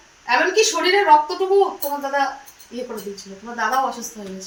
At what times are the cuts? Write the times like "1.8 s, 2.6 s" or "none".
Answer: none